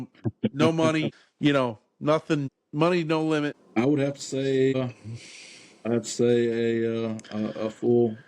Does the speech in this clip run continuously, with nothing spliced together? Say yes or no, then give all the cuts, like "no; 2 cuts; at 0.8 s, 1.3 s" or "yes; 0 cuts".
no; 4 cuts; at 1.2 s, 2.6 s, 3.6 s, 4.7 s